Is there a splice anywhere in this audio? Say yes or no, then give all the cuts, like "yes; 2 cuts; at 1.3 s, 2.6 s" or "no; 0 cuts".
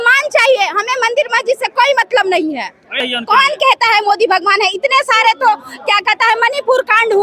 yes; 1 cut; at 3.0 s